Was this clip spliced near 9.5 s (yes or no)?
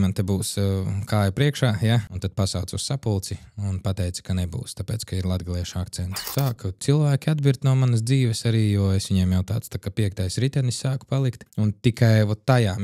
no